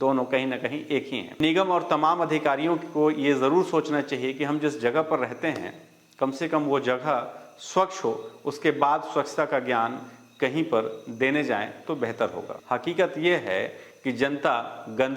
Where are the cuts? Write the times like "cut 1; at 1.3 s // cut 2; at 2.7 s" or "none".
cut 1; at 1.3 s // cut 2; at 12.5 s

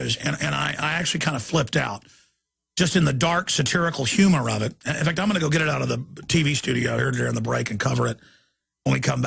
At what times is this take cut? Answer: cut 1; at 8.3 s

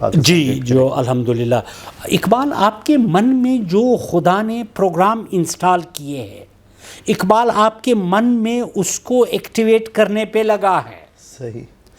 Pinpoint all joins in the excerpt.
cut 1; at 1.8 s

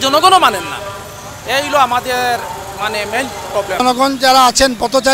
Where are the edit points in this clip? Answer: cut 1; at 3.7 s

